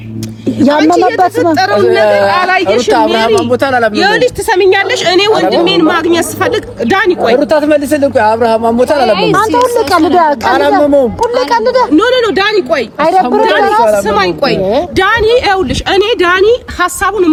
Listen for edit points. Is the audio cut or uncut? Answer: uncut